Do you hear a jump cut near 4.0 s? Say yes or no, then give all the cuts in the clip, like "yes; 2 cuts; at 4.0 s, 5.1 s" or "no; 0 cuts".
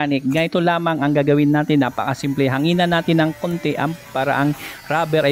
yes; 1 cut; at 4.0 s